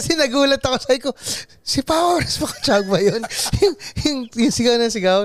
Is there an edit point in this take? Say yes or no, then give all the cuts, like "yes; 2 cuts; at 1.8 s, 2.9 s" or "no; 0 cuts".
no; 0 cuts